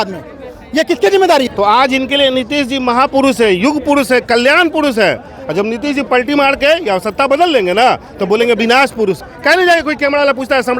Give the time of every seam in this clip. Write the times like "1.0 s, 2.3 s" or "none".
1.5 s, 9.3 s